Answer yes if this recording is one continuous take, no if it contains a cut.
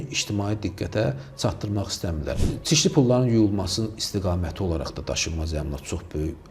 no